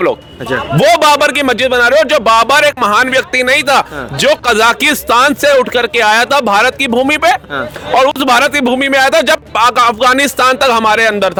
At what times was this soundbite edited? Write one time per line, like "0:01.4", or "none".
none

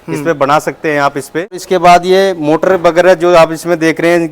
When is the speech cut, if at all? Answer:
0:01.6

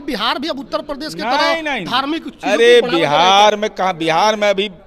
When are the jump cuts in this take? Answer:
none

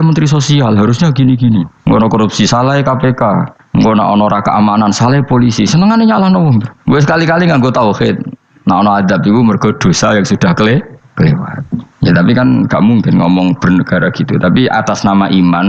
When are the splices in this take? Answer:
0:01.7
0:03.6

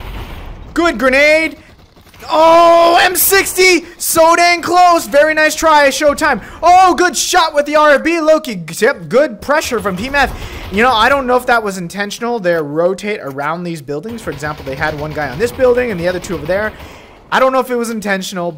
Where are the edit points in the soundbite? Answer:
none

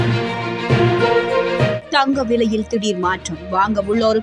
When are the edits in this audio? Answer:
0:01.8

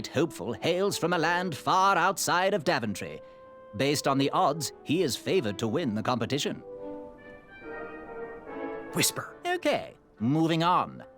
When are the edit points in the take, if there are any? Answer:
0:06.6
0:09.1

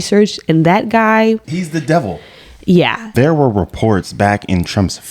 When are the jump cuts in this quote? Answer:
0:03.1

